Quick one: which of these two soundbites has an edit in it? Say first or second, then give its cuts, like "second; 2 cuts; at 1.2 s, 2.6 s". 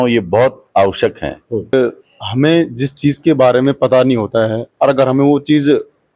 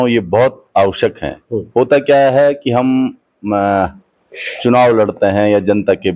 first; 1 cut; at 1.7 s